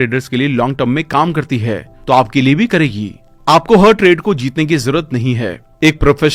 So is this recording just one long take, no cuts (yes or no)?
yes